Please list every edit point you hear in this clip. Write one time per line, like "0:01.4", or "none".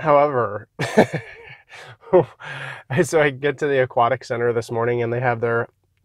none